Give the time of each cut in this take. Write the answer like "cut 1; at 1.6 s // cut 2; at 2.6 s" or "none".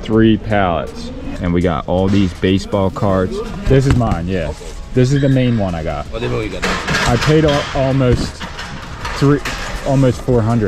cut 1; at 1.2 s // cut 2; at 3.5 s